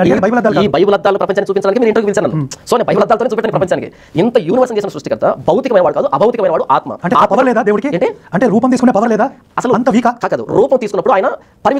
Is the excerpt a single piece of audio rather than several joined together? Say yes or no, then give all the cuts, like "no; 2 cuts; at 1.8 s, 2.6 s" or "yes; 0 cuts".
no; 1 cut; at 7.8 s